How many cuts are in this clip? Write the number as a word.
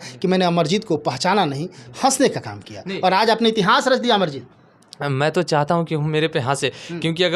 zero